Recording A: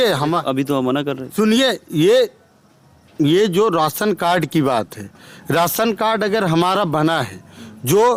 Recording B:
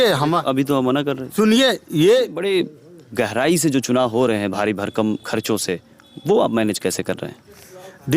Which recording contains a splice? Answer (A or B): B